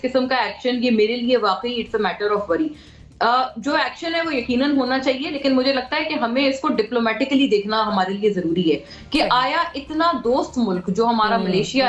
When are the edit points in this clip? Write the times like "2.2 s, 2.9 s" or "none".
none